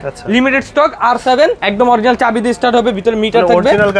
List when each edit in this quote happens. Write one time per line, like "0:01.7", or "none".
0:01.6